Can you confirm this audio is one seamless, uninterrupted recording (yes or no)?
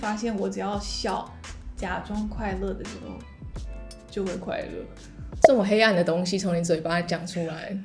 yes